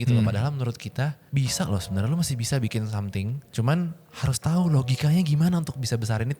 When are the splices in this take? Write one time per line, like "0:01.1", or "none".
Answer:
0:01.2
0:03.5